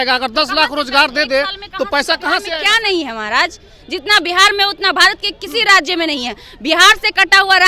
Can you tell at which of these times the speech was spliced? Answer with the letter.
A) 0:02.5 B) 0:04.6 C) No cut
A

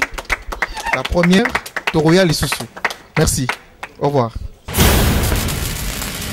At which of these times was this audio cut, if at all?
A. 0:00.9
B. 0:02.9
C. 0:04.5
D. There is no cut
C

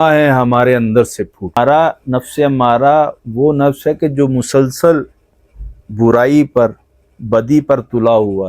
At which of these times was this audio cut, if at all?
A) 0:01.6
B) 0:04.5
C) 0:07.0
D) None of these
A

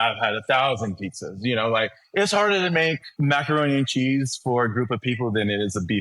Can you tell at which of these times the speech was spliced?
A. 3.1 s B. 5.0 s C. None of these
A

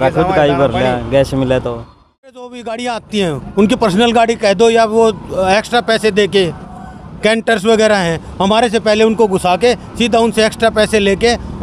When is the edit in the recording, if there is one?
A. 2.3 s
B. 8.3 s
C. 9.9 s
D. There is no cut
A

